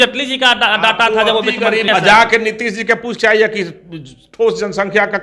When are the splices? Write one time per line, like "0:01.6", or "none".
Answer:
0:01.8